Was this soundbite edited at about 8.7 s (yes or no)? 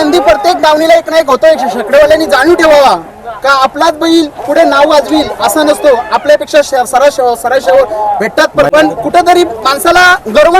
yes